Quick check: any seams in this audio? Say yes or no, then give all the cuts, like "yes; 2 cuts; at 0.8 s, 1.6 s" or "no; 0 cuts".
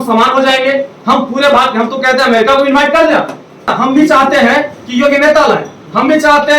yes; 1 cut; at 3.8 s